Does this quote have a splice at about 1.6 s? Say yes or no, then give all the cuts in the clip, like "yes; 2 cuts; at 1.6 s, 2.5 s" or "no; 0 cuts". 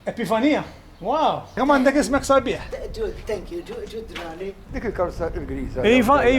no; 1 cut; at 4.7 s